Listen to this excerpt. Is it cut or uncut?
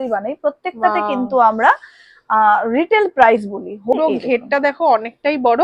cut